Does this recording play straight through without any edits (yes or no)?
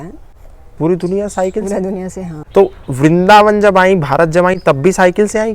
no